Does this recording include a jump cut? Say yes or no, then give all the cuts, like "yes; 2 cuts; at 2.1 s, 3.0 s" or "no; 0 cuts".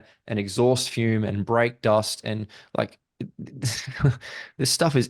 no; 0 cuts